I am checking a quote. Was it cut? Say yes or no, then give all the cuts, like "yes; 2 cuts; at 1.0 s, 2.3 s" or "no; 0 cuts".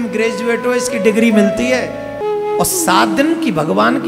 yes; 1 cut; at 2.2 s